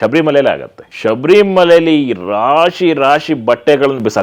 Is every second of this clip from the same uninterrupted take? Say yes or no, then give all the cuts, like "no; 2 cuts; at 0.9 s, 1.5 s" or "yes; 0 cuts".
yes; 0 cuts